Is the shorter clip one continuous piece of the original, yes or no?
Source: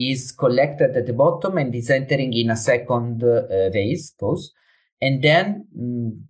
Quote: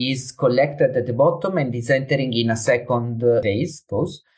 no